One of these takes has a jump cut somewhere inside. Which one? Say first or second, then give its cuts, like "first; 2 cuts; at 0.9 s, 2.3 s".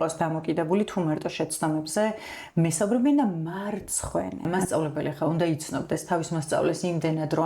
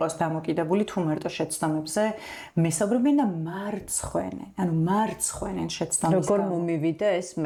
first; 1 cut; at 4.5 s